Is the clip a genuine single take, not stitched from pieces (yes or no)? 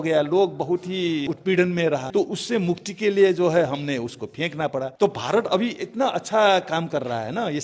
no